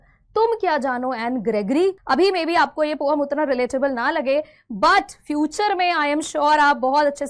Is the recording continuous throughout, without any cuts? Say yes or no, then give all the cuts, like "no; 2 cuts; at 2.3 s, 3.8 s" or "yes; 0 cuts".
no; 1 cut; at 2.0 s